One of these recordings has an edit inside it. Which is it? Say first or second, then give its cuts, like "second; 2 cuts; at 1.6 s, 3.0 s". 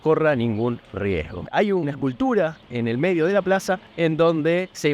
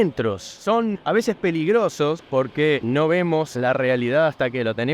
second; 3 cuts; at 1.0 s, 2.4 s, 3.5 s